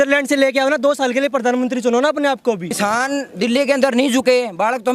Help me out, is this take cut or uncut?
cut